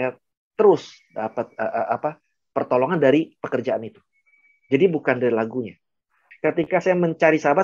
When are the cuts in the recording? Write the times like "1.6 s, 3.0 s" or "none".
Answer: 6.2 s